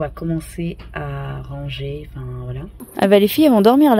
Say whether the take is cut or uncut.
cut